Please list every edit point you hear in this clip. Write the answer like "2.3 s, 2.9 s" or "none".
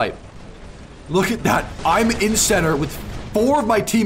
1.7 s